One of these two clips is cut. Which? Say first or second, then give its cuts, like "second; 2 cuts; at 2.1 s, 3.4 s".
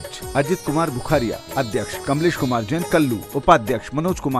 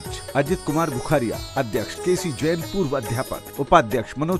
first; 2 cuts; at 1.9 s, 3.2 s